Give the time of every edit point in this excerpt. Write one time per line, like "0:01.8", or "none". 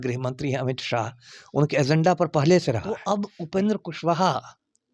0:03.0